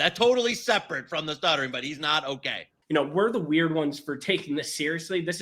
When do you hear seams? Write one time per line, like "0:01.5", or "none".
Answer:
0:02.7